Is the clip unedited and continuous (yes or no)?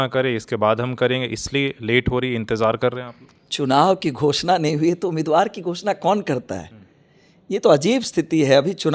yes